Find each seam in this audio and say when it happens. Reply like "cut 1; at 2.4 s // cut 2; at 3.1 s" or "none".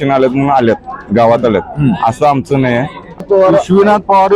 cut 1; at 3.2 s